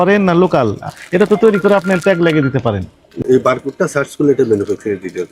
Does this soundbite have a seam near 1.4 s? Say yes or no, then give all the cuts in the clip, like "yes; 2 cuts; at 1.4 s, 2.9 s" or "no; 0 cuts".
no; 1 cut; at 3.2 s